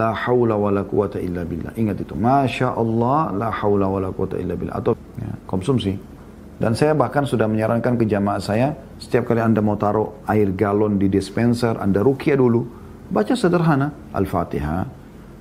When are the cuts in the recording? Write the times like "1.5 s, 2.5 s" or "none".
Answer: 4.9 s